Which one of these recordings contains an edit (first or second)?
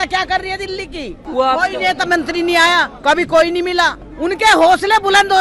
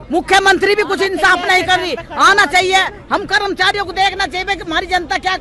first